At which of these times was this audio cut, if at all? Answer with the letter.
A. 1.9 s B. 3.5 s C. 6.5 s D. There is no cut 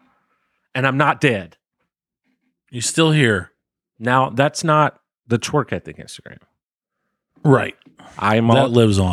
D